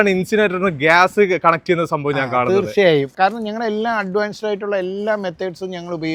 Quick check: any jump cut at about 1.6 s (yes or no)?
no